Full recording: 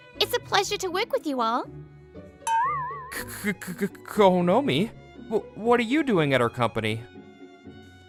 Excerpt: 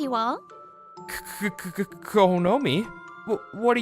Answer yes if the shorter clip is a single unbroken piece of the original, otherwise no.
no